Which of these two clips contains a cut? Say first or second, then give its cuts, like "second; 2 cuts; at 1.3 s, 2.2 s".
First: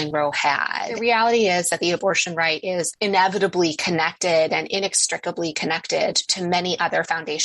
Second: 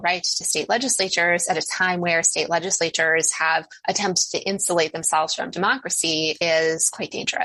first; 2 cuts; at 1.0 s, 2.9 s